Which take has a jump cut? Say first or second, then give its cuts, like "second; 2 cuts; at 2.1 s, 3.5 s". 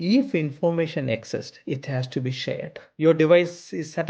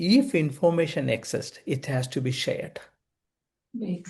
first; 1 cut; at 2.8 s